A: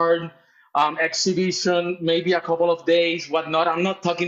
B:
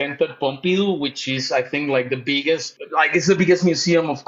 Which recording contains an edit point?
B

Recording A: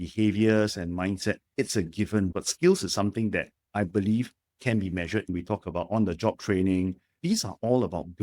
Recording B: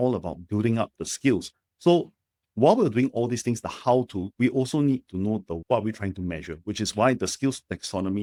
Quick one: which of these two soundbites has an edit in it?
A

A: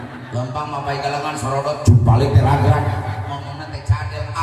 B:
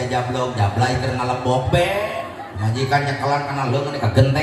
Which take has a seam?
B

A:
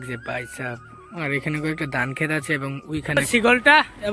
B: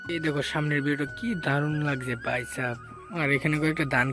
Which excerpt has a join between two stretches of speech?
A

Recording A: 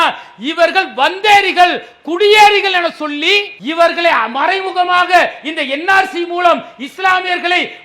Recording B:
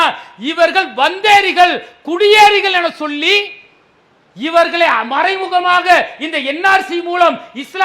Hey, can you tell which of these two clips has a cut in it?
A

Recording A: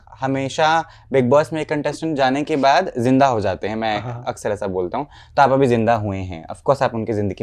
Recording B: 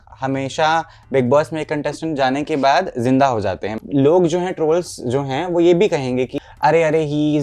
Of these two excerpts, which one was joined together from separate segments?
B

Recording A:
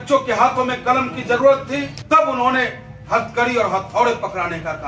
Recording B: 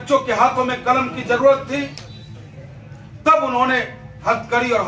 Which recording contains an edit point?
A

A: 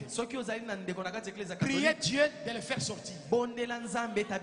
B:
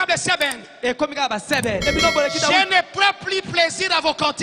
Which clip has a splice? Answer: B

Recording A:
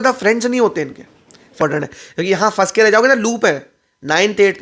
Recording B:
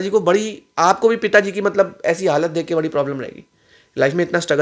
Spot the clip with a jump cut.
A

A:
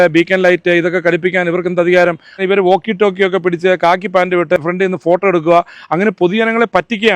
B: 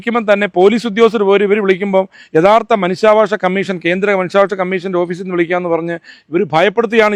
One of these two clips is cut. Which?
A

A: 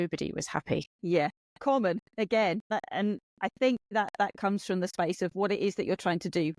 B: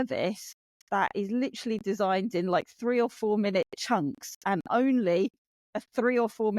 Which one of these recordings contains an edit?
A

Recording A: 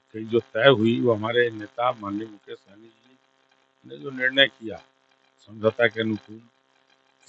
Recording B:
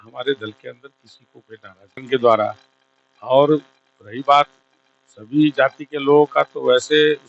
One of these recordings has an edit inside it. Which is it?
B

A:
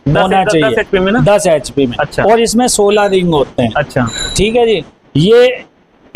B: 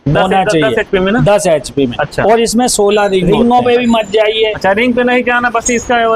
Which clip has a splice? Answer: B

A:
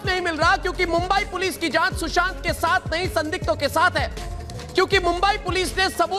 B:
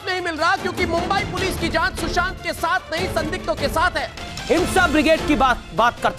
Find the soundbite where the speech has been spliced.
B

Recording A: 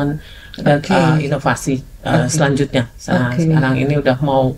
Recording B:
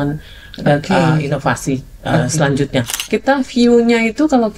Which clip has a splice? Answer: B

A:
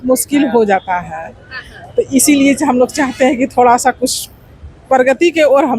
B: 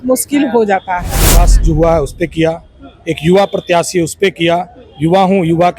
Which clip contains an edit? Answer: B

